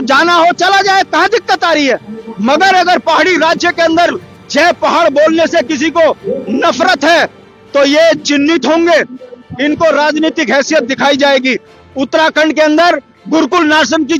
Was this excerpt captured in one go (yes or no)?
yes